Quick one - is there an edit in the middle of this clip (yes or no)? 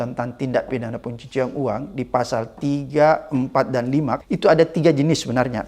yes